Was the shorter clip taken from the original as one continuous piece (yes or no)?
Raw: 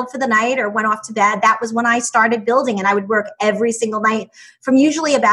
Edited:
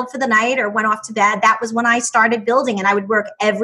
yes